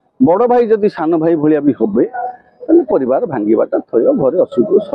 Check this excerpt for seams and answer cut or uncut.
uncut